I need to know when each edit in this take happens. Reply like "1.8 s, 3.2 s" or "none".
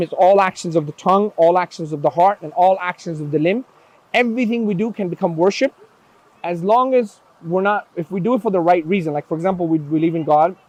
none